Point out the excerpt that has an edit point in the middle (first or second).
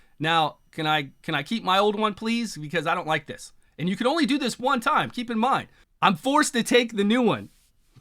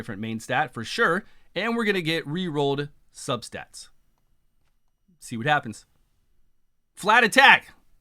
first